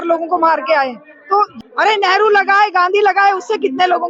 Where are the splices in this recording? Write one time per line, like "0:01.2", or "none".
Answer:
0:01.5